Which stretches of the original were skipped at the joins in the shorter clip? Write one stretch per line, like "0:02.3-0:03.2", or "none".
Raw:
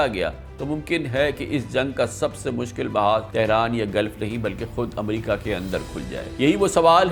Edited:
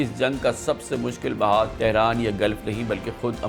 none